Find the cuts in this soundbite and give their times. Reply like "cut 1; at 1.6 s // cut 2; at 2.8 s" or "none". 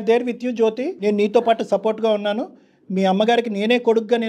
cut 1; at 1.0 s